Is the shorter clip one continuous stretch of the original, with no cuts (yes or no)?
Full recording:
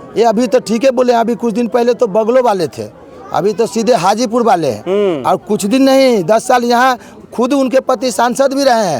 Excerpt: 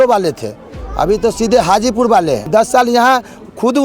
no